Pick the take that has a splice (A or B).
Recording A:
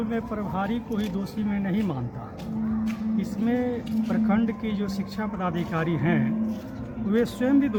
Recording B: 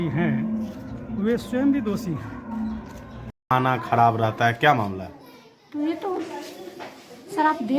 B